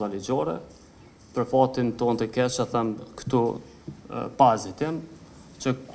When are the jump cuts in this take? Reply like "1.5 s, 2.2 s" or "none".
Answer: none